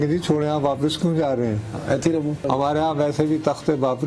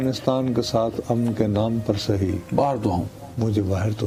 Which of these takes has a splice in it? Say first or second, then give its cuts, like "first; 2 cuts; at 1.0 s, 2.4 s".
first; 1 cut; at 2.4 s